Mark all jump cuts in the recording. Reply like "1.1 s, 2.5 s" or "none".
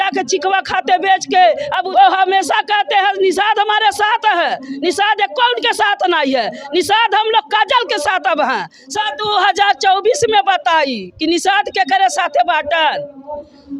1.8 s, 8.9 s